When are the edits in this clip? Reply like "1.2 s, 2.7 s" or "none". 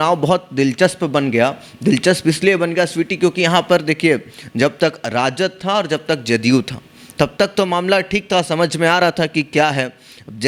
none

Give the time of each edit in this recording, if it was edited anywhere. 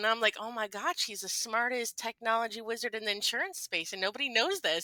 none

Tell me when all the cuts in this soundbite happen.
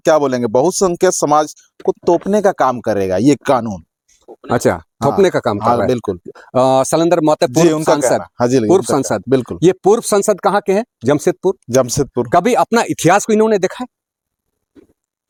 none

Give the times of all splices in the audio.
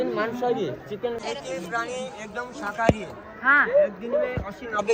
1.2 s

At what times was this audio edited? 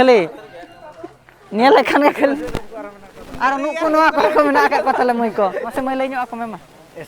5.7 s

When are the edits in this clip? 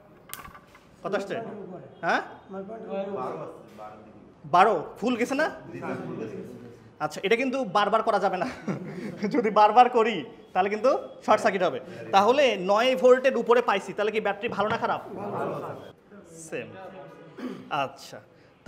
15.9 s

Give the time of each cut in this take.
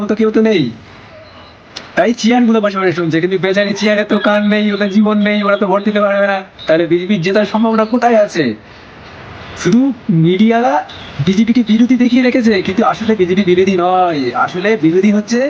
none

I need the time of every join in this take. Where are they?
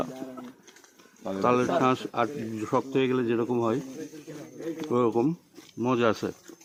none

